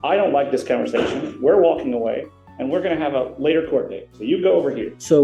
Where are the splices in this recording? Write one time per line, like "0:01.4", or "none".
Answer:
none